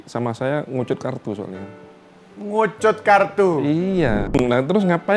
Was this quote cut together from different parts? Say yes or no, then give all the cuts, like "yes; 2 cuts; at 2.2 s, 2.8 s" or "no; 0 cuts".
yes; 1 cut; at 4.3 s